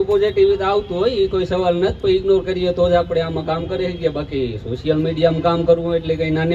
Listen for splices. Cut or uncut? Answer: uncut